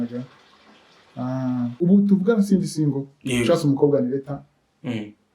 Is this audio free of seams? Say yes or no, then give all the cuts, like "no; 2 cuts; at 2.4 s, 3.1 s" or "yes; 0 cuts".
no; 1 cut; at 1.8 s